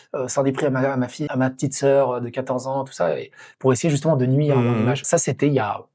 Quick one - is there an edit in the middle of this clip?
yes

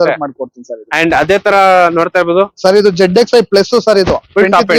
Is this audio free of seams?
yes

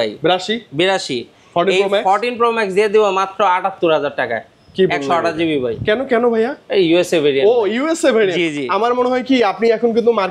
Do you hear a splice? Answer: no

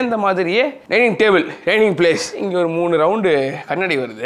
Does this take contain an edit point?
yes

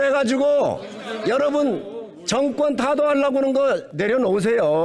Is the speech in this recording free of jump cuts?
no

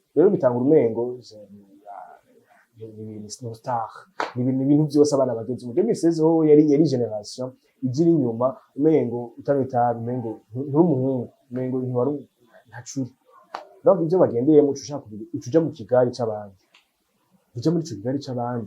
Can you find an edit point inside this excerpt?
no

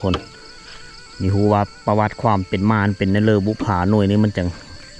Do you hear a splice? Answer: no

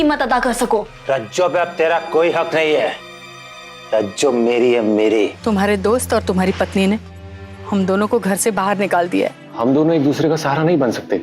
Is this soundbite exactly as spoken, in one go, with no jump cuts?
no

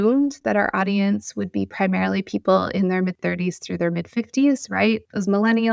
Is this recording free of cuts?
yes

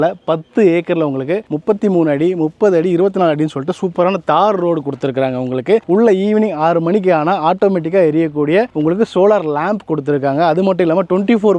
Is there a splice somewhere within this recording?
no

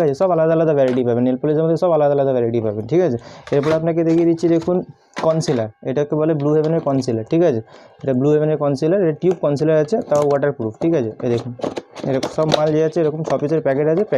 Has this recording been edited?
no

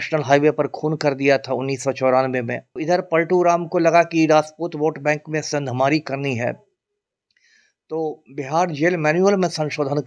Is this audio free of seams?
no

